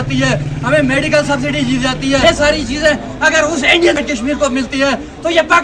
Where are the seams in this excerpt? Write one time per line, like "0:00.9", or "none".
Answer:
0:02.2